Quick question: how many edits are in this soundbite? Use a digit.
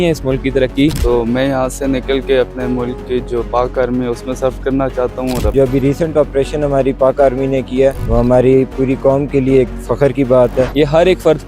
4